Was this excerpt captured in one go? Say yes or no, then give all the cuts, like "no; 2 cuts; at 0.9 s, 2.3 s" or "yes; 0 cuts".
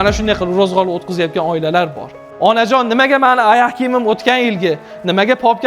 no; 1 cut; at 2.2 s